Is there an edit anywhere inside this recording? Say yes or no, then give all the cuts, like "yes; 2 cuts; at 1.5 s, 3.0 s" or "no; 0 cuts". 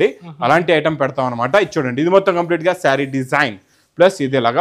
no; 0 cuts